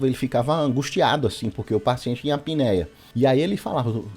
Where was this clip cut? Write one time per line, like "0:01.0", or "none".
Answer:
0:03.0